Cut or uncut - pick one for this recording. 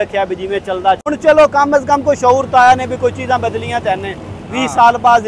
cut